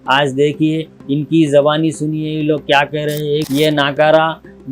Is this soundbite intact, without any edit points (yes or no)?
no